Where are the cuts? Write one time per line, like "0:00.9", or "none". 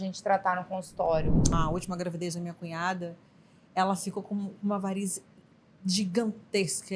0:01.4